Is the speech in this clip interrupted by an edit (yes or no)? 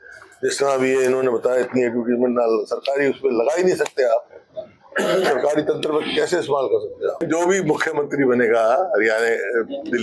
yes